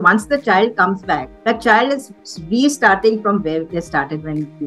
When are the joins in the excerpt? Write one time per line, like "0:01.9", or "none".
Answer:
0:01.3